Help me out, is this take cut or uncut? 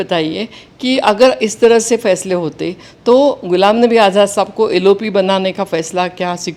uncut